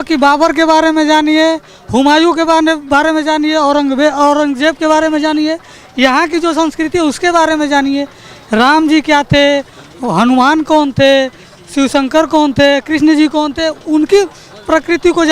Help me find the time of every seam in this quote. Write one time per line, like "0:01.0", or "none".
none